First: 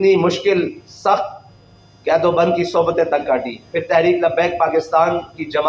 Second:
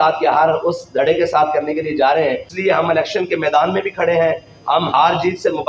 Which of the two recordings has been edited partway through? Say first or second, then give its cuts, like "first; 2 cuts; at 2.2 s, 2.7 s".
second; 1 cut; at 2.5 s